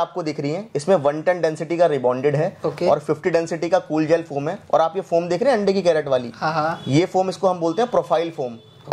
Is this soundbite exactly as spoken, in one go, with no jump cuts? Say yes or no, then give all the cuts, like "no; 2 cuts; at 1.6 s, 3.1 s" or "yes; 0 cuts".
yes; 0 cuts